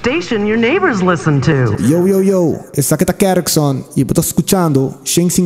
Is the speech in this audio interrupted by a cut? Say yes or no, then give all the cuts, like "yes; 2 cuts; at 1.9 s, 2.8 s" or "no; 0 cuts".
yes; 1 cut; at 1.7 s